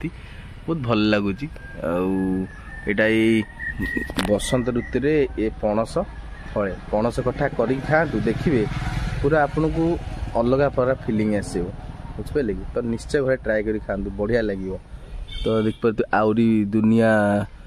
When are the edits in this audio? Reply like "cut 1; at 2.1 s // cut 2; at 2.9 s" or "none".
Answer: none